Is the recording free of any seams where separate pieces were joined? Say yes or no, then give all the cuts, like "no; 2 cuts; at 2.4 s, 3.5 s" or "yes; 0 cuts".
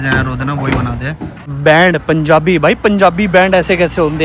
no; 1 cut; at 1.5 s